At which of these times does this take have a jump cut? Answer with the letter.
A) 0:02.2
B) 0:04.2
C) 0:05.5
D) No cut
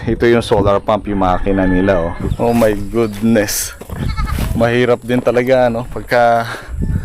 A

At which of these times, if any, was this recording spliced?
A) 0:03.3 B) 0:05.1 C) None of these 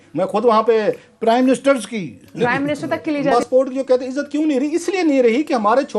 A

